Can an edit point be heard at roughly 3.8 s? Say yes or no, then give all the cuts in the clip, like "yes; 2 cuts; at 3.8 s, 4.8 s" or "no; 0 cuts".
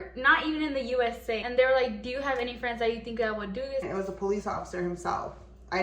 yes; 2 cuts; at 1.4 s, 3.8 s